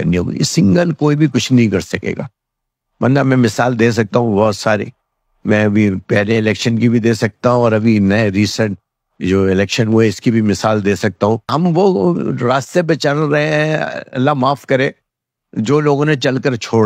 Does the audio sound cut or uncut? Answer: cut